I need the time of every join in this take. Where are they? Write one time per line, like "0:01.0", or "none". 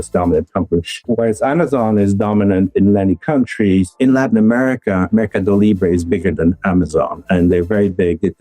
0:01.0
0:03.9